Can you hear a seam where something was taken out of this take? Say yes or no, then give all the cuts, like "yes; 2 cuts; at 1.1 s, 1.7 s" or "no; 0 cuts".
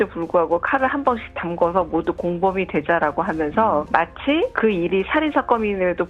no; 0 cuts